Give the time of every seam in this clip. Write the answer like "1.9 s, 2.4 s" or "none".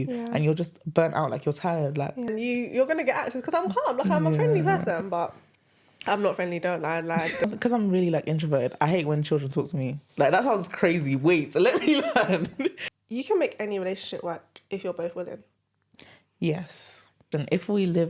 2.3 s, 7.4 s, 12.9 s, 17.3 s